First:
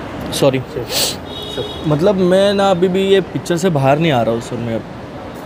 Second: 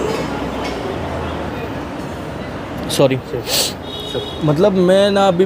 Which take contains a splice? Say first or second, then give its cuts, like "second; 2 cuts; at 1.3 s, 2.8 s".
second; 1 cut; at 1.5 s